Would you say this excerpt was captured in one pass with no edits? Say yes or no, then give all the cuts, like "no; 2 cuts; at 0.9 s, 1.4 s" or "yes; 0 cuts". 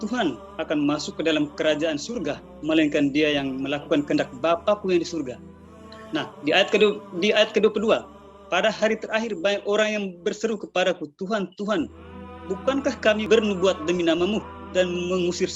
no; 1 cut; at 13.2 s